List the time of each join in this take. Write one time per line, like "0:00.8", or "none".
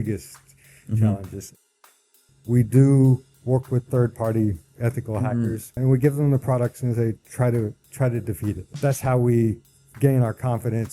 0:01.7
0:05.8
0:08.7